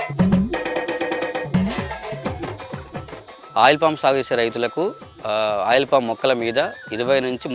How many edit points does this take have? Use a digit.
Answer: 1